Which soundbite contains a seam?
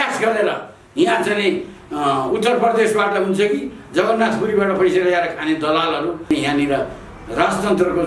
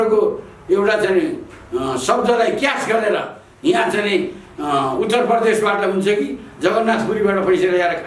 first; 1 cut; at 6.3 s

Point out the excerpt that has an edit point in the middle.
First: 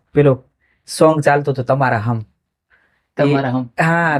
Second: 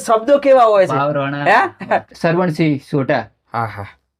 second; 1 cut; at 2.1 s

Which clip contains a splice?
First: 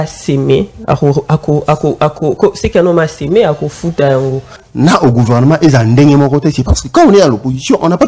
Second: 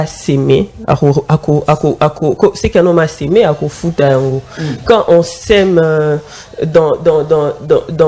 first; 1 cut; at 4.6 s

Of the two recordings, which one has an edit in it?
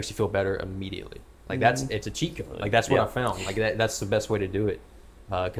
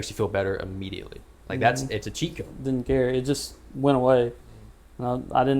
second; 1 cut; at 2.5 s

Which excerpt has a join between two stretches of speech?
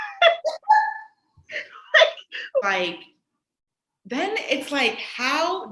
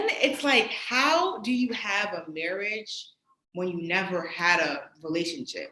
first; 1 cut; at 2.6 s

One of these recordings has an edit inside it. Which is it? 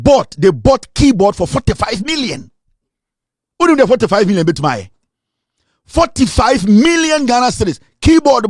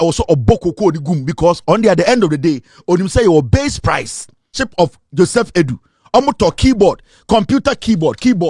second; 1 cut; at 4.6 s

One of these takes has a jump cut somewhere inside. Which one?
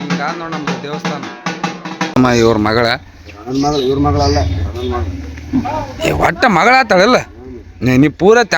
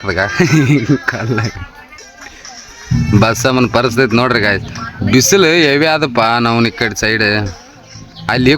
first; 1 cut; at 2.1 s

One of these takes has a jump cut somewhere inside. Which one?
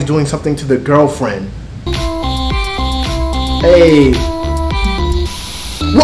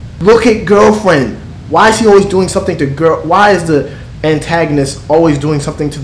first; 1 cut; at 1.9 s

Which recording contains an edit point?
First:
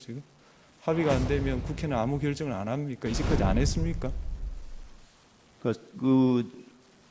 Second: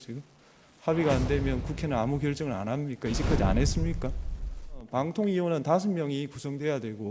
second; 1 cut; at 4.9 s

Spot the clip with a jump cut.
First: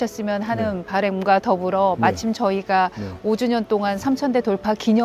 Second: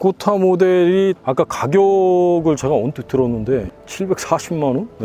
second; 2 cuts; at 1.2 s, 3.7 s

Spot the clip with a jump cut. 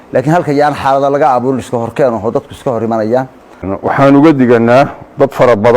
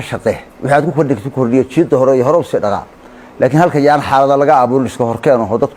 first; 1 cut; at 3.7 s

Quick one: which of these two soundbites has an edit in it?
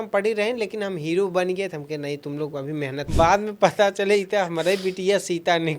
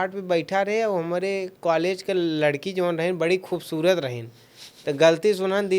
first; 1 cut; at 3.0 s

